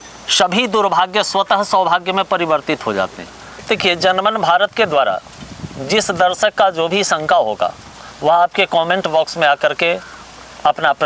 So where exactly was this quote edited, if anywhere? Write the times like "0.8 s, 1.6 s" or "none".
3.5 s